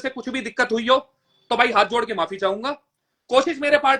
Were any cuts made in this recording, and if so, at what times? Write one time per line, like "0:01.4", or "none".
none